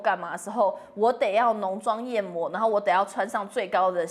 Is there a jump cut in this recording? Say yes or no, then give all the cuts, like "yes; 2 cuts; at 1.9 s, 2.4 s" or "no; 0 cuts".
no; 0 cuts